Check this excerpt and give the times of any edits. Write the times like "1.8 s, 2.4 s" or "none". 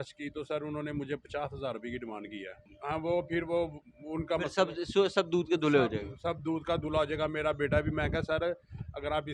2.7 s